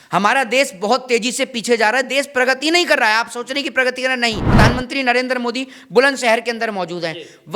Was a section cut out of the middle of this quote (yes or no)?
yes